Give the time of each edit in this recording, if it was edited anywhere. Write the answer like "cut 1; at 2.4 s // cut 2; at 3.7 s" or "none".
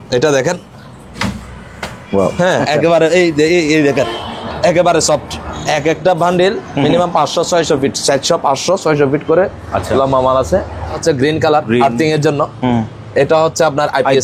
cut 1; at 5.4 s // cut 2; at 11.0 s